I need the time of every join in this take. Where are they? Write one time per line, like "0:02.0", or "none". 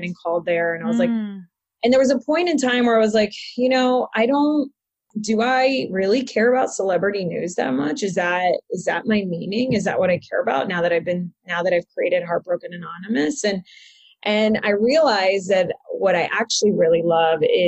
0:05.1